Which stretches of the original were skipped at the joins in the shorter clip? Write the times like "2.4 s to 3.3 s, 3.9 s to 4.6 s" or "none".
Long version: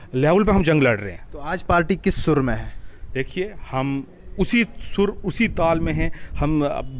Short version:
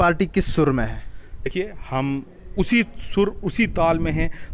3.1 s to 3.3 s